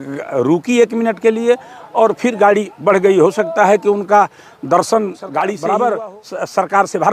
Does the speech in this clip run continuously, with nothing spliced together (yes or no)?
no